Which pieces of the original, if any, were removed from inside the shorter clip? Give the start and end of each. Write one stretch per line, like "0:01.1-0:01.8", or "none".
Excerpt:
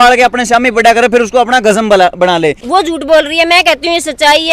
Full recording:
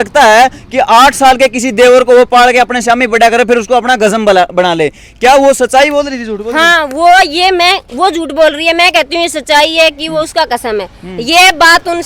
0:05.0-0:07.9